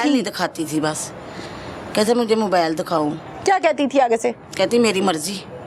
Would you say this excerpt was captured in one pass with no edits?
yes; 0 cuts

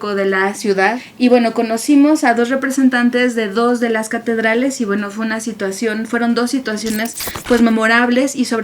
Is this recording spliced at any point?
yes; 1 cut; at 1.0 s

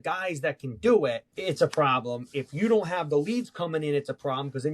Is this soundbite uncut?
no; 1 cut; at 1.3 s

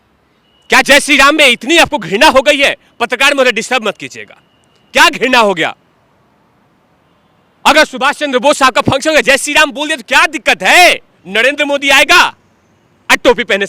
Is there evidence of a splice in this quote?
yes; 1 cut; at 11.2 s

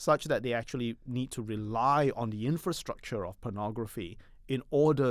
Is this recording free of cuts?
yes; 0 cuts

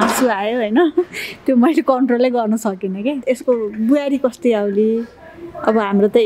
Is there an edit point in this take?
yes; 1 cut; at 3.2 s

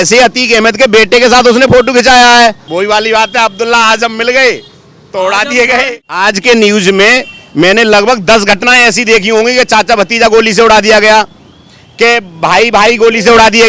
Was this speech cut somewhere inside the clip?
yes; 2 cuts; at 2.6 s, 6.0 s

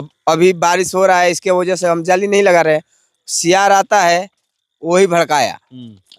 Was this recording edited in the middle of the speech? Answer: no; 0 cuts

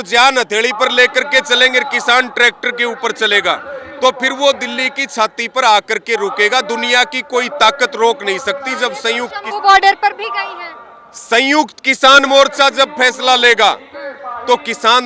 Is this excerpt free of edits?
yes; 0 cuts

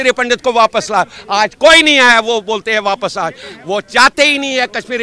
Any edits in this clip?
no; 0 cuts

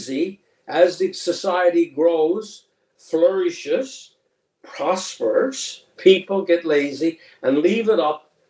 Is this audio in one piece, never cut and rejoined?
yes; 0 cuts

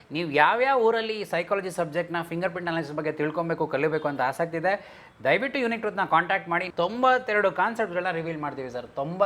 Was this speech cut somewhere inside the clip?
yes; 1 cut; at 6.7 s

